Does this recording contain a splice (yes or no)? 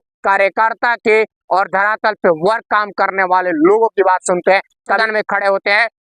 yes